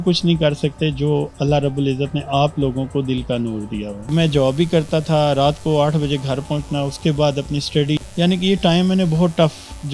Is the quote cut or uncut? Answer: cut